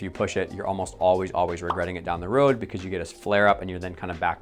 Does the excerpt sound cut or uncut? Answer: uncut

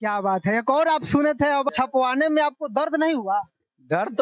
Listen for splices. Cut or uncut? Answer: cut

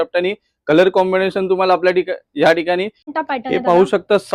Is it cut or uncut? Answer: cut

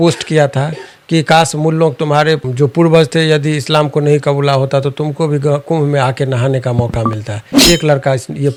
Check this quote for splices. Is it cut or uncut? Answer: uncut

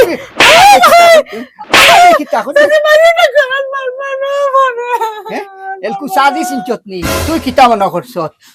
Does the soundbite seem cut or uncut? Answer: uncut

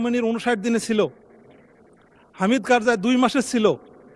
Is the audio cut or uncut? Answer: uncut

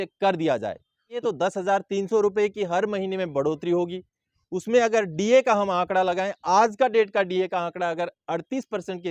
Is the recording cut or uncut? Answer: cut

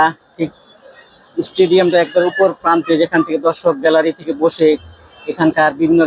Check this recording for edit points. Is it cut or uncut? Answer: uncut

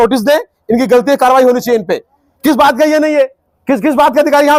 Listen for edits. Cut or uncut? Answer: uncut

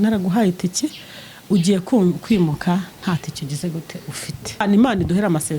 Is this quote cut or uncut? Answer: cut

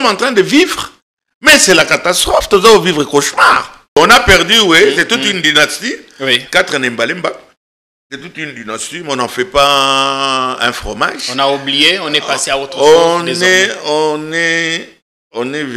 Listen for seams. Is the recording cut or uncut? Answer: cut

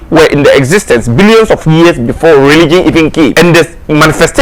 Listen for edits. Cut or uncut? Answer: cut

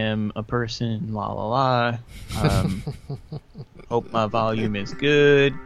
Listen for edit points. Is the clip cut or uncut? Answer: uncut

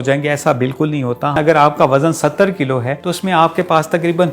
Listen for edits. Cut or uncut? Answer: cut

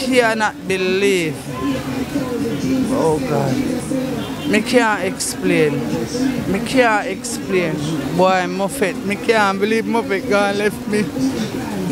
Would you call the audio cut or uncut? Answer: uncut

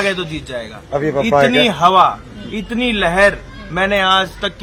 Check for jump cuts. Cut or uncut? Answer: uncut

